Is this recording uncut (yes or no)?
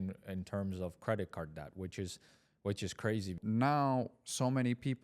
no